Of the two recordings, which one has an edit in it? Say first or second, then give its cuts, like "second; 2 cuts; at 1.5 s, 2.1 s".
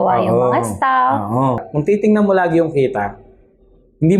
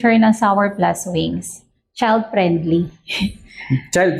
first; 1 cut; at 1.7 s